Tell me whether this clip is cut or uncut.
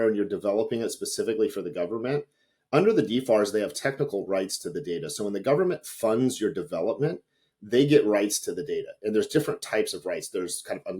uncut